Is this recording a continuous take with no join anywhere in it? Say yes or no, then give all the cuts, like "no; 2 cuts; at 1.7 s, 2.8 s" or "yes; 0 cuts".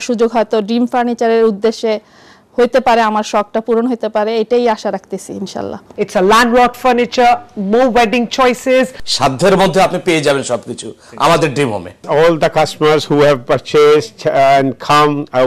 no; 3 cuts; at 5.8 s, 9.0 s, 12.0 s